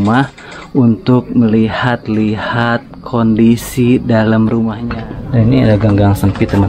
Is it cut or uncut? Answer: cut